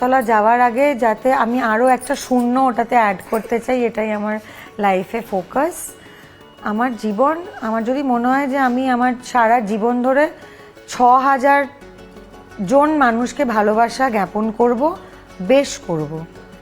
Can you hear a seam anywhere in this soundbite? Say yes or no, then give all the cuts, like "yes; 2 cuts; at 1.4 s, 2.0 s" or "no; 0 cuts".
no; 0 cuts